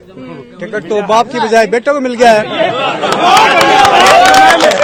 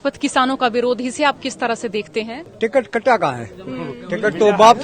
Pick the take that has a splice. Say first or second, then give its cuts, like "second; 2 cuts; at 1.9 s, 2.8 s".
second; 1 cut; at 2.4 s